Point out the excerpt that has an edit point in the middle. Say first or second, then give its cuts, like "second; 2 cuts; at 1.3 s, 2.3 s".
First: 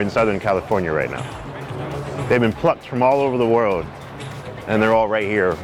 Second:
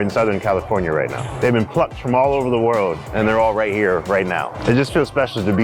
second; 3 cuts; at 1.2 s, 3.0 s, 4.5 s